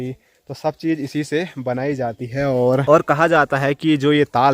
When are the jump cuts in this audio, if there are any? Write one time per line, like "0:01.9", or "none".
0:02.8